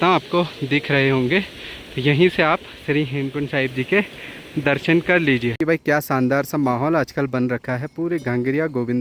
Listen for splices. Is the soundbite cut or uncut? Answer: cut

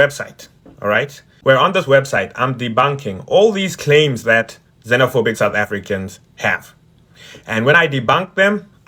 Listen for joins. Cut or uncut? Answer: uncut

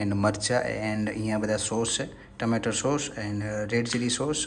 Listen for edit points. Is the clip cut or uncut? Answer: uncut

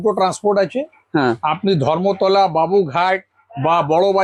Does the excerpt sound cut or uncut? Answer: uncut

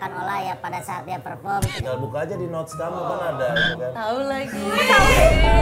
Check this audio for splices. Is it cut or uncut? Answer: uncut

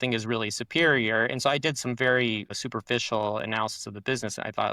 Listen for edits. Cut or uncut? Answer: cut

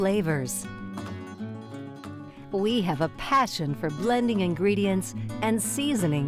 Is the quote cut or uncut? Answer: uncut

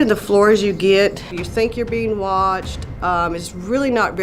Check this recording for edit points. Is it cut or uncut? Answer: cut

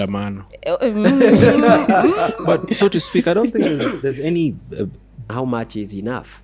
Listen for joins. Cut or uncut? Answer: cut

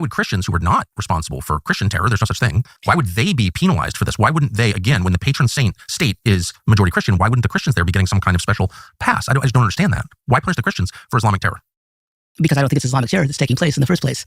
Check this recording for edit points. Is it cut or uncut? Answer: cut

